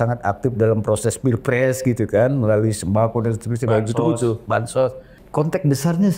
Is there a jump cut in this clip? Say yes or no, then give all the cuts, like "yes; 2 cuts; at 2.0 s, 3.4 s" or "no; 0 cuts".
yes; 1 cut; at 5.2 s